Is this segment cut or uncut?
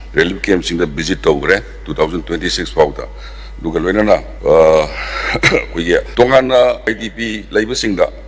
cut